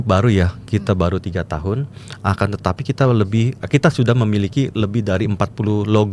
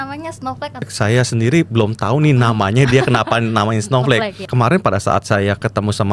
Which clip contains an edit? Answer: second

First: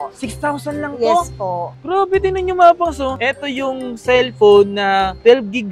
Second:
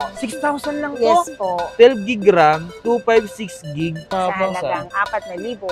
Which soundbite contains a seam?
second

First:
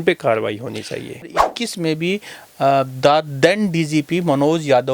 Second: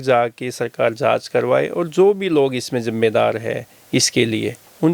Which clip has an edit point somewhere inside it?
first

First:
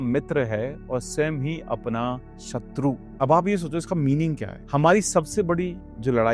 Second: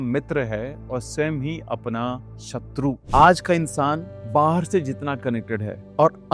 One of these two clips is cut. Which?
second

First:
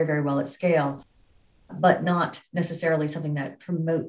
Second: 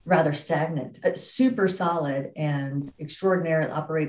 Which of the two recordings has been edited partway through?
second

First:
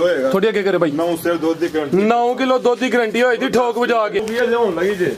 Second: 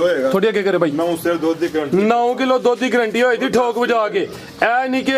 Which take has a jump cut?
first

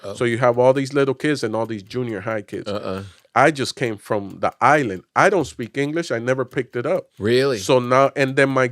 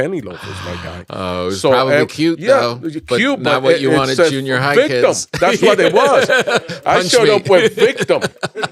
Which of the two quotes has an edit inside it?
first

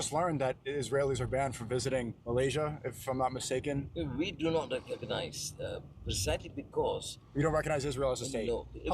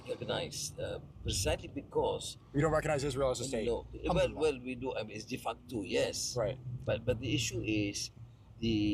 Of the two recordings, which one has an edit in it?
first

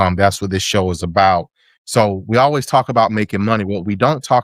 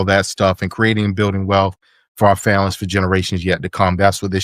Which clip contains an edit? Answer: first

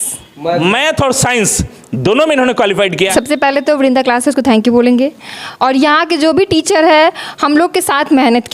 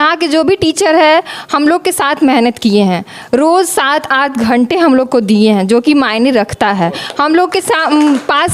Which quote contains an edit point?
first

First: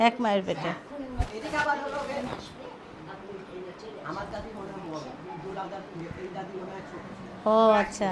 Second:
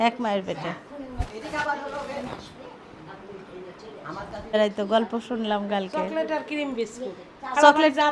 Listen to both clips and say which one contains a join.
second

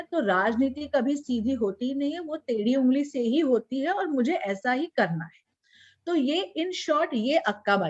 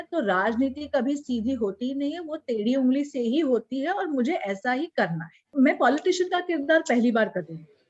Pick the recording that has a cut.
second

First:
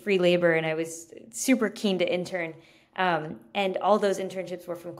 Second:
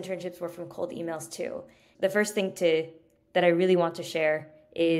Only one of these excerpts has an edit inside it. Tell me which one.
second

